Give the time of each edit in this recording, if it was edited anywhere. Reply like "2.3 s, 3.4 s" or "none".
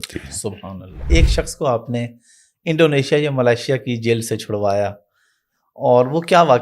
1.0 s